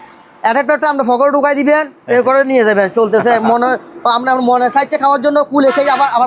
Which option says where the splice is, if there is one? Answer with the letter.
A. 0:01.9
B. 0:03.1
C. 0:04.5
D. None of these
D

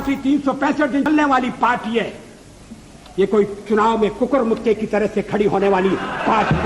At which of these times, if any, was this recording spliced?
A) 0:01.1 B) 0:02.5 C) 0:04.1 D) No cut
A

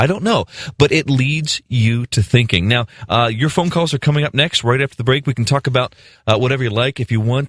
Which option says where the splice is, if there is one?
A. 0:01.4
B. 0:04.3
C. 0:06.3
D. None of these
D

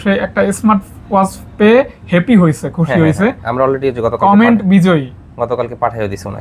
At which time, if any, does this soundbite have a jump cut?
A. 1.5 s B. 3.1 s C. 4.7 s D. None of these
D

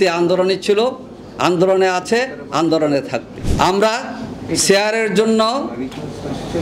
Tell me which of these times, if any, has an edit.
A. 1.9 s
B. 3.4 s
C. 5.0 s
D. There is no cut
B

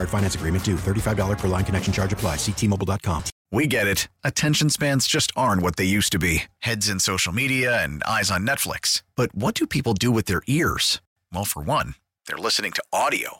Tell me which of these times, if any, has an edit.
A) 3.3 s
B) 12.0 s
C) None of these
A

